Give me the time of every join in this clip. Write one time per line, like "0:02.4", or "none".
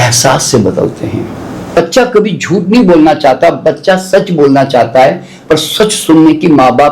0:01.7